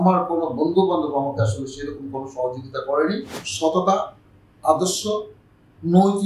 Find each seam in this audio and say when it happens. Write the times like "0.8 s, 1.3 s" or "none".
3.4 s